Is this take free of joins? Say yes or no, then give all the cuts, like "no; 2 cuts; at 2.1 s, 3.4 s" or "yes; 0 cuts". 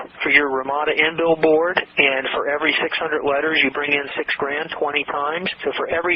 yes; 0 cuts